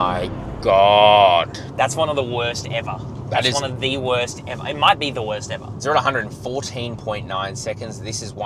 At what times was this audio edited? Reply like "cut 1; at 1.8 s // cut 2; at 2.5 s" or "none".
none